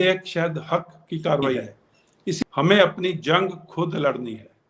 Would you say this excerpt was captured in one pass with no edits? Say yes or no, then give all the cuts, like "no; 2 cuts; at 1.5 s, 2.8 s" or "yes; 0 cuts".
no; 1 cut; at 2.4 s